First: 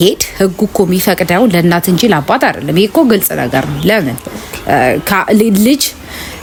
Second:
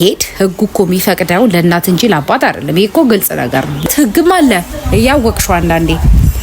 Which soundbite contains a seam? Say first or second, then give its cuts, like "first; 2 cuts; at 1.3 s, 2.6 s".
second; 1 cut; at 3.9 s